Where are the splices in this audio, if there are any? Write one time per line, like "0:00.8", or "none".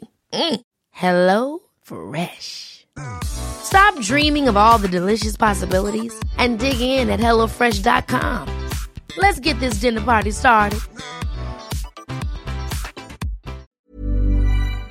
0:13.7